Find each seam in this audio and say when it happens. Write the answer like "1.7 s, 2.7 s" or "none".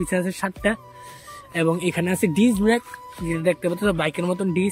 none

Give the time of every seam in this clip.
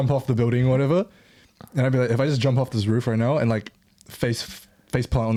none

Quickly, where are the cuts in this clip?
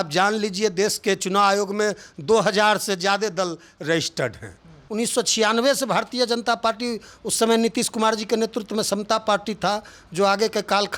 4.8 s

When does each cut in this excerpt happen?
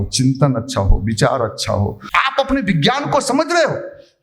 2.0 s

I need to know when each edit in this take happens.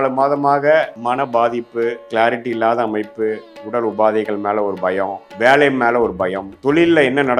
1.0 s, 2.0 s, 5.2 s, 6.5 s

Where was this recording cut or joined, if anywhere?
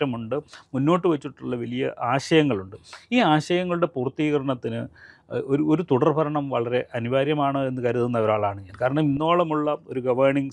none

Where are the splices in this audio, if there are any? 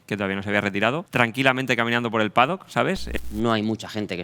1.1 s, 3.1 s

